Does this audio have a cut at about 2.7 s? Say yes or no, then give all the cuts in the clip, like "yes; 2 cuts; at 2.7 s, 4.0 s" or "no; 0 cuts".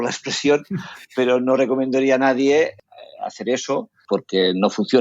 yes; 2 cuts; at 2.7 s, 4.0 s